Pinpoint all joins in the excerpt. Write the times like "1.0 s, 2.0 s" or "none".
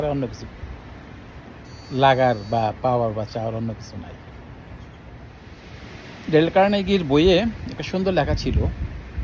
5.6 s

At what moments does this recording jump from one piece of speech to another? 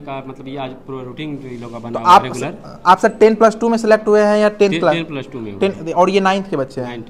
none

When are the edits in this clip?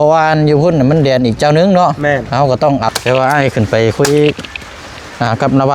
2.9 s

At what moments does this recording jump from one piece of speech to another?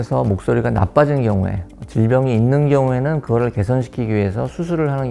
none

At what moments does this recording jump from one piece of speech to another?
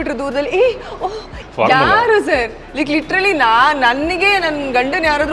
1.3 s

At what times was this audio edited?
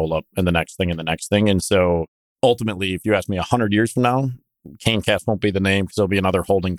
2.2 s

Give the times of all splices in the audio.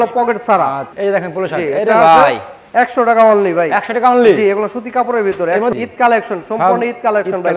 0.9 s, 5.7 s

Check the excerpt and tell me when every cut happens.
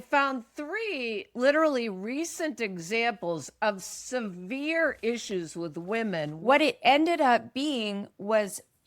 6.3 s

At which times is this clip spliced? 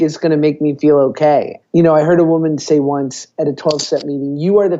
1.6 s

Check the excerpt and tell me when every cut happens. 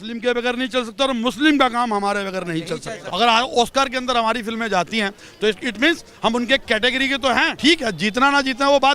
3.0 s, 7.5 s

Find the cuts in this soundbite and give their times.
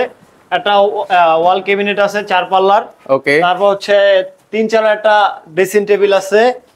none

